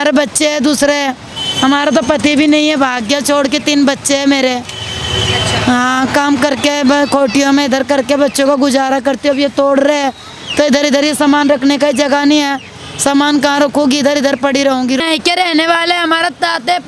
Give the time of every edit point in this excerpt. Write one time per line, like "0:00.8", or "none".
0:15.0